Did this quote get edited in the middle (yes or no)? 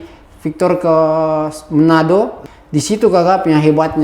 yes